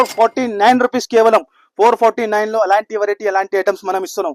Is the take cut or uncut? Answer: uncut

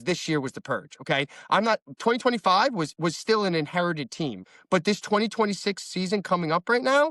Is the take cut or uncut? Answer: cut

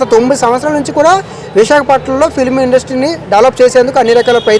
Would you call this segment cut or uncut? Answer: uncut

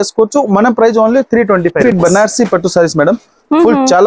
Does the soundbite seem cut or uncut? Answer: cut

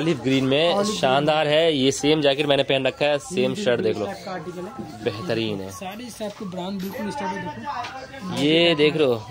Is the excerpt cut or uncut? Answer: uncut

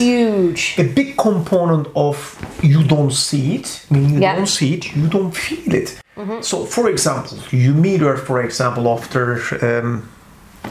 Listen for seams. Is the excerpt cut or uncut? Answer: uncut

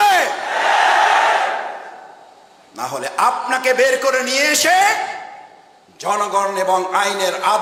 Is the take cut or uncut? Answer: uncut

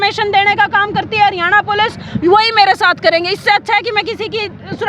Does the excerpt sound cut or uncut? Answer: uncut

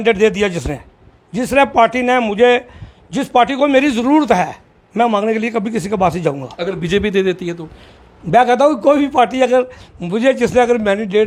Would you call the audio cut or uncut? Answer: uncut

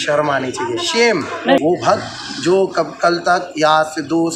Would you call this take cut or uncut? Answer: cut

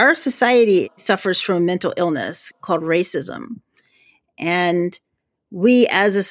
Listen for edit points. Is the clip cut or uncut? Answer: cut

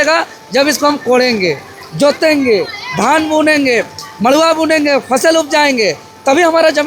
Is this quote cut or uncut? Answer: uncut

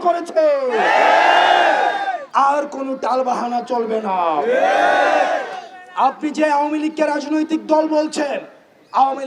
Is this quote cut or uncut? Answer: cut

